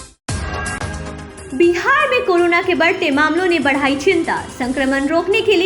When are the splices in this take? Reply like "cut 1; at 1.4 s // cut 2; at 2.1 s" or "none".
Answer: cut 1; at 1.0 s